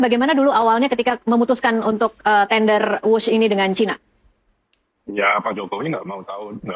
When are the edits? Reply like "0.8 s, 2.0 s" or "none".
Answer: none